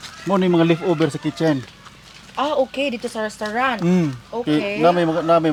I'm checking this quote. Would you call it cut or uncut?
uncut